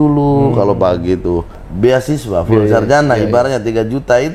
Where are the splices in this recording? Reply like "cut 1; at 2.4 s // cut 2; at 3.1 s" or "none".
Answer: cut 1; at 1.6 s